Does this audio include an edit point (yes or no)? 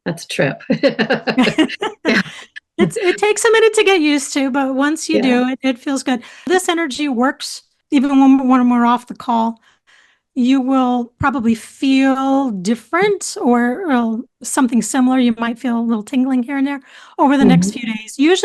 no